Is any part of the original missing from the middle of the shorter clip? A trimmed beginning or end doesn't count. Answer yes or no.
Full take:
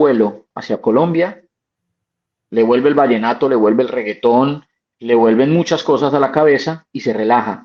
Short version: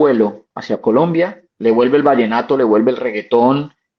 yes